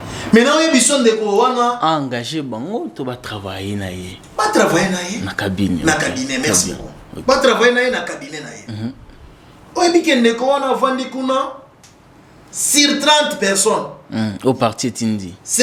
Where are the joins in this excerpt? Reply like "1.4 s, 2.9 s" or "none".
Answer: none